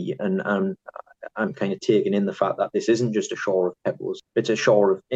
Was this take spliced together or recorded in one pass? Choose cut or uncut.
cut